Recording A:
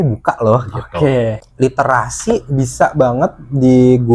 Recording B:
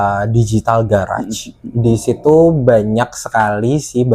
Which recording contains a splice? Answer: A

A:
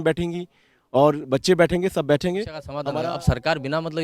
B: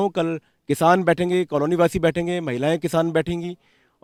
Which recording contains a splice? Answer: A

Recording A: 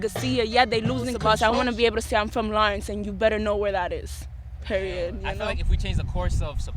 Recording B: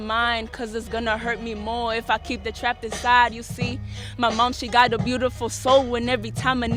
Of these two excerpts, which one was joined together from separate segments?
A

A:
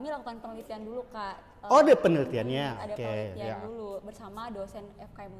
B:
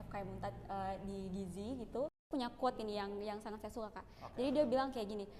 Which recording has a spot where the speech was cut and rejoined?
B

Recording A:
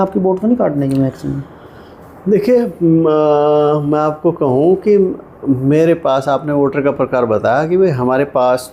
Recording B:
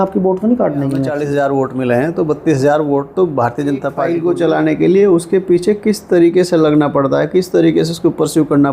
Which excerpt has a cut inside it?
B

